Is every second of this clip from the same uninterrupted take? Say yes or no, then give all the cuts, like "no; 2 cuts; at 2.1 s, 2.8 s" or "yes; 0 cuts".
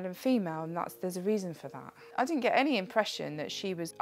no; 1 cut; at 2.0 s